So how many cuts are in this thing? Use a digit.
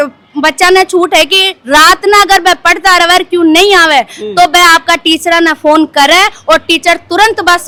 0